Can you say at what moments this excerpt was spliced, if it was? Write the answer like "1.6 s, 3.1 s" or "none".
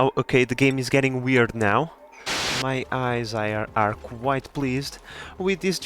2.4 s